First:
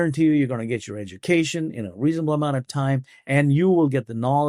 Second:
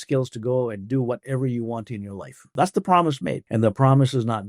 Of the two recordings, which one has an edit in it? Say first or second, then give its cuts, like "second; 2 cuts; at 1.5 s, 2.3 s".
second; 2 cuts; at 2.5 s, 3.4 s